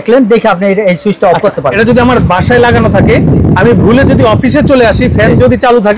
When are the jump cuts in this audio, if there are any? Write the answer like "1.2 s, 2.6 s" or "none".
1.7 s